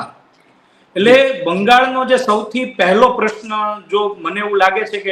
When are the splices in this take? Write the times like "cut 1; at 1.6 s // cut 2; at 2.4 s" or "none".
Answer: none